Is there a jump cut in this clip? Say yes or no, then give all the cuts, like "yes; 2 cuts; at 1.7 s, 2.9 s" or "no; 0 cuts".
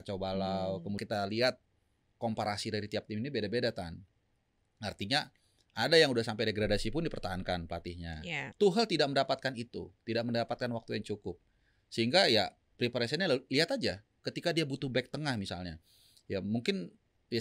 yes; 2 cuts; at 1.0 s, 8.4 s